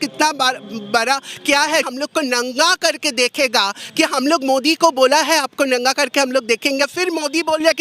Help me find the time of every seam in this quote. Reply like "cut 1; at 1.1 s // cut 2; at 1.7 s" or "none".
cut 1; at 1.9 s // cut 2; at 6.9 s